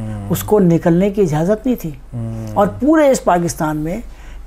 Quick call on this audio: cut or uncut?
uncut